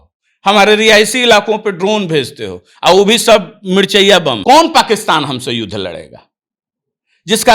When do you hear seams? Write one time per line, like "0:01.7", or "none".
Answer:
0:04.4